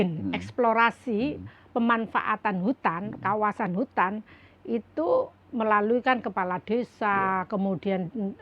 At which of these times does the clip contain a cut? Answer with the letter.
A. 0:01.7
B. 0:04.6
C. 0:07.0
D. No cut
D